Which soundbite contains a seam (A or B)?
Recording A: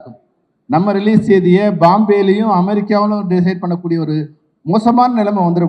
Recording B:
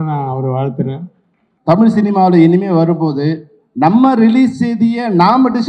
B